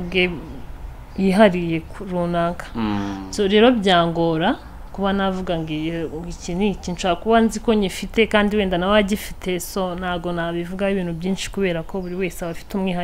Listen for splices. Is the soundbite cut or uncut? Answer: uncut